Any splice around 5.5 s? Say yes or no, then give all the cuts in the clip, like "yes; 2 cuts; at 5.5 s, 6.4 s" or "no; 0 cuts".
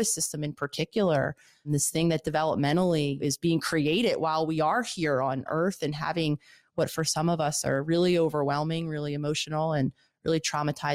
yes; 3 cuts; at 1.7 s, 3.2 s, 5.5 s